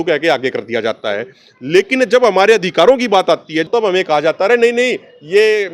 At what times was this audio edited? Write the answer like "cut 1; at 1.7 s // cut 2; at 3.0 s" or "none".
cut 1; at 3.7 s